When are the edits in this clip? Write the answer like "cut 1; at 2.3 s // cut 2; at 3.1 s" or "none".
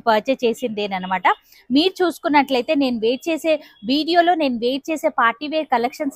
none